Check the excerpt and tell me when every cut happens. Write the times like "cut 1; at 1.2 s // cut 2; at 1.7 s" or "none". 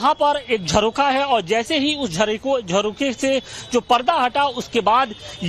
cut 1; at 1.8 s